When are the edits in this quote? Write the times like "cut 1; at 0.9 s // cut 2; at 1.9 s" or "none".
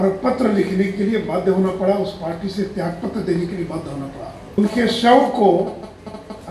cut 1; at 4.6 s

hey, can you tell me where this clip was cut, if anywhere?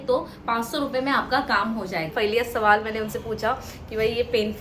cut 1; at 2.1 s

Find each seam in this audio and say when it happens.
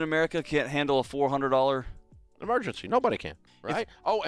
cut 1; at 3.4 s

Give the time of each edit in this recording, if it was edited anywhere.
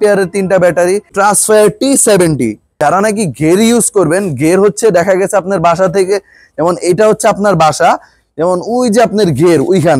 cut 1; at 1.1 s // cut 2; at 2.7 s

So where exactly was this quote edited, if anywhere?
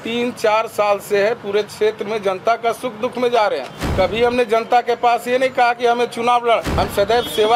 cut 1; at 3.8 s // cut 2; at 6.7 s

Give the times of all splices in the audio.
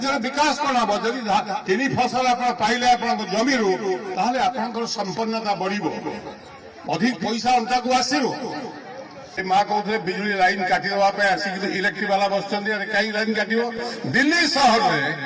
cut 1; at 9.4 s

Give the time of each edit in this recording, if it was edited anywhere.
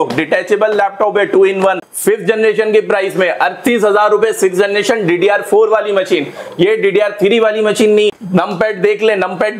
cut 1; at 1.8 s // cut 2; at 8.2 s

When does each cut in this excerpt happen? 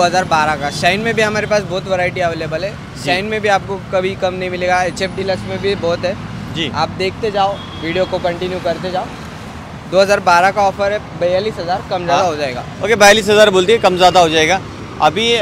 none

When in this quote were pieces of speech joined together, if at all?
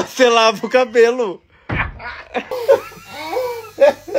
cut 1; at 2.5 s

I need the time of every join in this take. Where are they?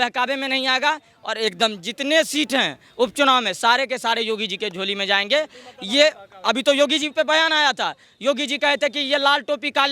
none

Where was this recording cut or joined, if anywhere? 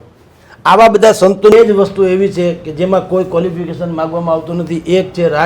cut 1; at 1.5 s

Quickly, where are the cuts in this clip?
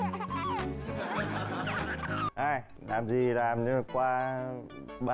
cut 1; at 2.3 s

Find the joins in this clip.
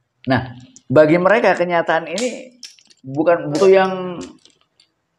cut 1; at 3.6 s

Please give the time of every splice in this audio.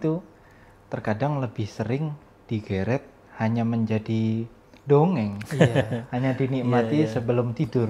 none

